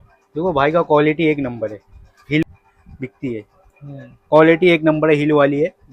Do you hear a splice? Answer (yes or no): yes